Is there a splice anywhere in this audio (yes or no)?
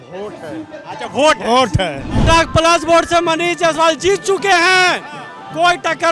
yes